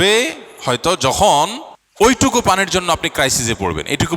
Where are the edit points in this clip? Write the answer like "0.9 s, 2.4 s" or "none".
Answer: 2.1 s